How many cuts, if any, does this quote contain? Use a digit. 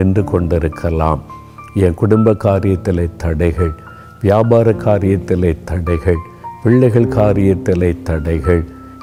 0